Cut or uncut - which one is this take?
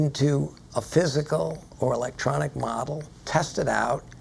cut